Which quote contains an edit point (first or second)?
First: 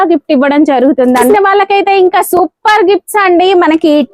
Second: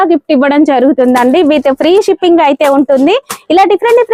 first